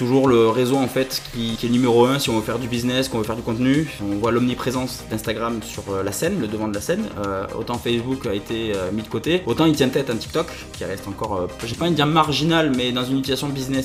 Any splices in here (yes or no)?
no